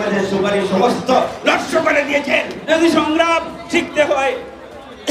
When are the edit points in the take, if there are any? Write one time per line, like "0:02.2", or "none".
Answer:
0:02.6